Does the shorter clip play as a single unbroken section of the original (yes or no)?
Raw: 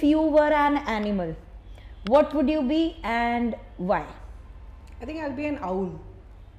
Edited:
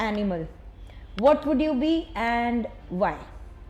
yes